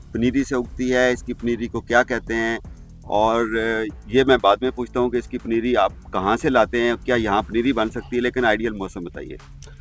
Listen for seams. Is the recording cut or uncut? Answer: uncut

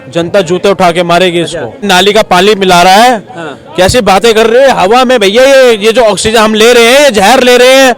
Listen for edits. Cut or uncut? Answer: cut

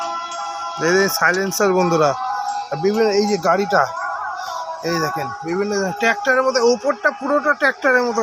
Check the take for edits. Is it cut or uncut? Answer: uncut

